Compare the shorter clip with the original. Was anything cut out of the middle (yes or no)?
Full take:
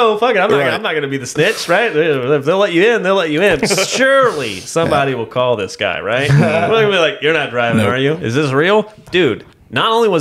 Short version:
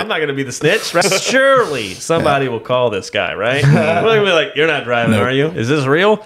yes